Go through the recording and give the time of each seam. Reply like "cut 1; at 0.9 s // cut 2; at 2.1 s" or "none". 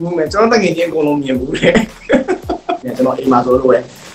cut 1; at 2.9 s